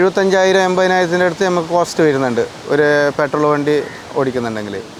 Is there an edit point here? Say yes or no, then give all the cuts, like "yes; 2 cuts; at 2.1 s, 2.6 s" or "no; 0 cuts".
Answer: no; 0 cuts